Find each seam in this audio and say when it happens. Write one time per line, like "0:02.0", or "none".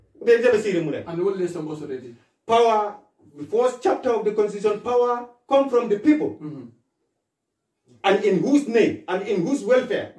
none